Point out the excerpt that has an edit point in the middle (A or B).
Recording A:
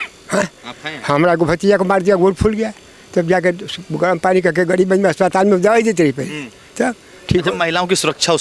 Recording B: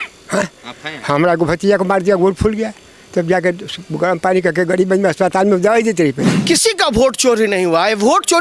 B